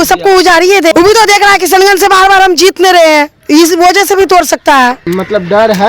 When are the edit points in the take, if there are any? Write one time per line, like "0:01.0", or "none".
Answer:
0:00.9
0:03.4
0:05.1